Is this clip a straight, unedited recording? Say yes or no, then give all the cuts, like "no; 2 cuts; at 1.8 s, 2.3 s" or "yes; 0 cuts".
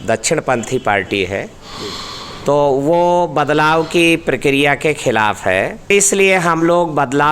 no; 1 cut; at 5.9 s